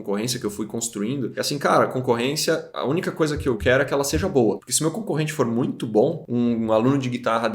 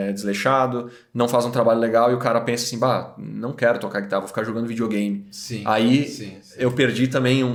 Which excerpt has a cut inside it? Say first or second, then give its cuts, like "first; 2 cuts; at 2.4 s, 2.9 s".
first; 5 cuts; at 1.3 s, 2.7 s, 3.6 s, 4.7 s, 6.2 s